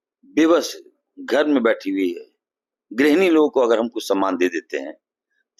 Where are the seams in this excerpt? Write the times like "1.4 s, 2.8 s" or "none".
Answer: none